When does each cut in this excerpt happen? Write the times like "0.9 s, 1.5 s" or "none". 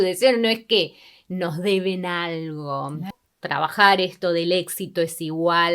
3.1 s